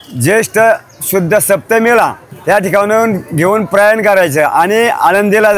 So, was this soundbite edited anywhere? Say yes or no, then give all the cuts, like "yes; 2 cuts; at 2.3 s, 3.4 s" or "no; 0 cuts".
yes; 1 cut; at 2.3 s